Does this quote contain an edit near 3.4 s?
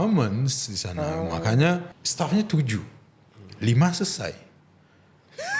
no; 1 cut; at 2.0 s

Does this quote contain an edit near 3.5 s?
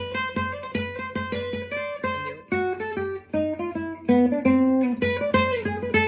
no; 1 cut; at 1.3 s

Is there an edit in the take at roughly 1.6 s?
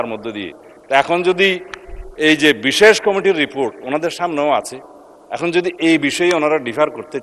no; 0 cuts

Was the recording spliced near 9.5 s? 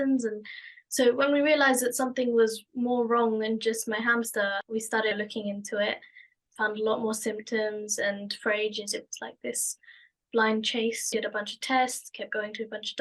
no; 1 cut; at 11.1 s

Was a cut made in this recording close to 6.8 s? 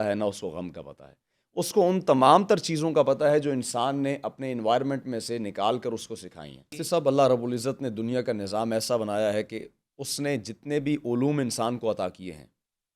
yes; 1 cut; at 6.8 s

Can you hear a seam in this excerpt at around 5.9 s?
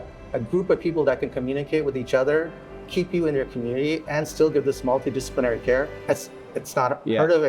yes; 1 cut; at 5.9 s

